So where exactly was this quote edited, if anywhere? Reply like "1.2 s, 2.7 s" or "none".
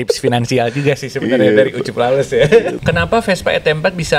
2.8 s